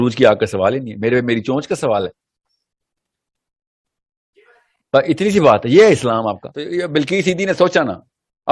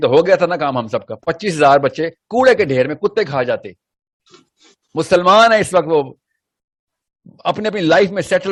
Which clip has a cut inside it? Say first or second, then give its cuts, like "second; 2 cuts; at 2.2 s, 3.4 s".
first; 1 cut; at 6.5 s